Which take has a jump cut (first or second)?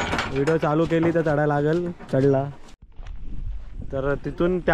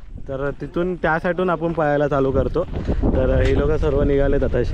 first